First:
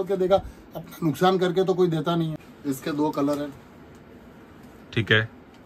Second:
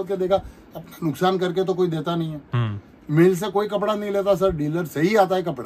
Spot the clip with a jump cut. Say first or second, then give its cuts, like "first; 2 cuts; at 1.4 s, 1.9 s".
first; 1 cut; at 2.4 s